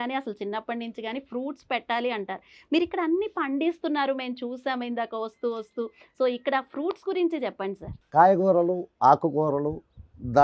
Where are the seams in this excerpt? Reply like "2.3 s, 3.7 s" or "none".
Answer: none